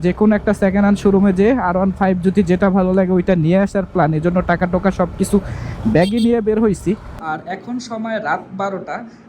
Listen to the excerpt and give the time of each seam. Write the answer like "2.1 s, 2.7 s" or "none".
7.2 s